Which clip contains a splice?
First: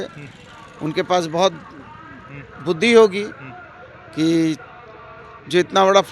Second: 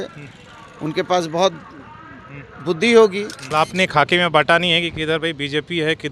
second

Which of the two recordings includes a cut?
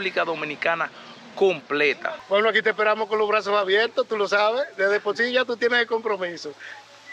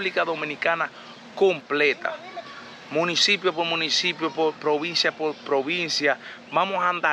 first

